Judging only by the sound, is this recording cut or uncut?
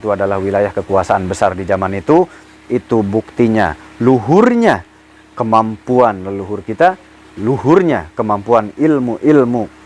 uncut